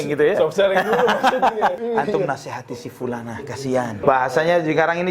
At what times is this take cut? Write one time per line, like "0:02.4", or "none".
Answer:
0:01.8
0:04.0